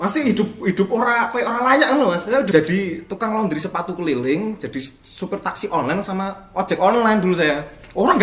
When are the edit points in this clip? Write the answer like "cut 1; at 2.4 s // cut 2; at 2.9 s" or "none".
cut 1; at 2.5 s